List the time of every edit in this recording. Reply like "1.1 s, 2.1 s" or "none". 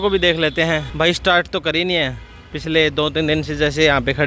none